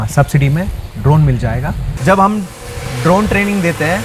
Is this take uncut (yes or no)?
no